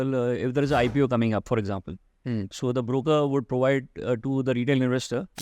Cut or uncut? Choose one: uncut